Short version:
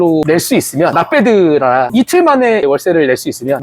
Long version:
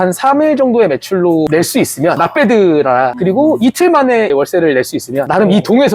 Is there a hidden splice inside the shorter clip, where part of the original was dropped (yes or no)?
yes